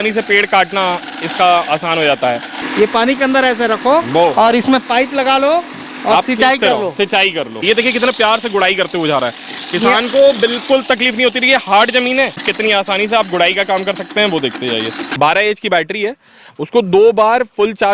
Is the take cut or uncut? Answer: cut